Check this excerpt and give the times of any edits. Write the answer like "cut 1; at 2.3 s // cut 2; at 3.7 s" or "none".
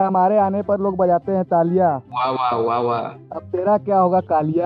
none